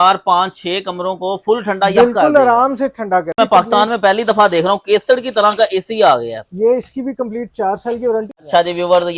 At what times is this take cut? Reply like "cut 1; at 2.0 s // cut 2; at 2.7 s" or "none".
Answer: cut 1; at 3.3 s // cut 2; at 8.4 s